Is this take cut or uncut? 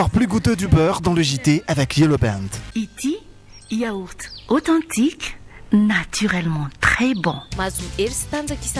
cut